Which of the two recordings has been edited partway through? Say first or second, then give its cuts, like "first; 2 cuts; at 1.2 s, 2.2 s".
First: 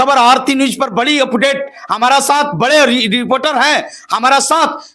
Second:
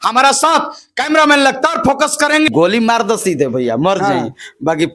second; 1 cut; at 2.5 s